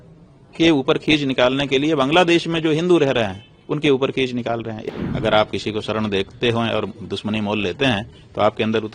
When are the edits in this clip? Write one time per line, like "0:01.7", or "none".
0:04.8